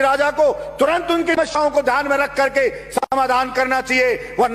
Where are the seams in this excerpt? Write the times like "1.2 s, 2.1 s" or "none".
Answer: 1.4 s